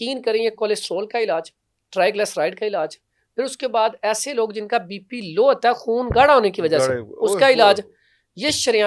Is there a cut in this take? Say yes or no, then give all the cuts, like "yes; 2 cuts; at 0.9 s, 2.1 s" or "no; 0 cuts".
no; 0 cuts